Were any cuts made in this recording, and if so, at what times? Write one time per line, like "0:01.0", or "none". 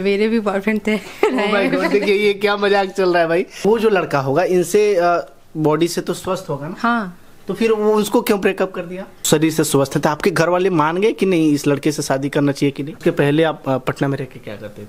0:03.6
0:09.1
0:13.0